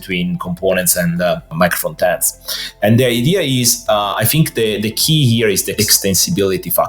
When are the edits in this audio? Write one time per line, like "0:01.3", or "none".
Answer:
0:01.5
0:05.7